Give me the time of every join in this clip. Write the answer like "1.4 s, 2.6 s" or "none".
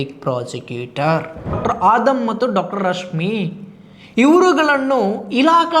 1.5 s